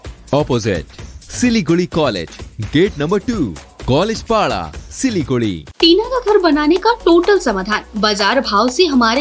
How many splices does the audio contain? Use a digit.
1